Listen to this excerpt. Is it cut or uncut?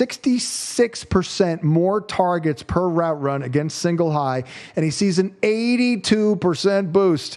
uncut